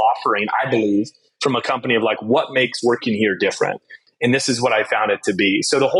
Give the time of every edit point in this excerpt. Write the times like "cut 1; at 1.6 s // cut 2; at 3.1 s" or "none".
cut 1; at 4.0 s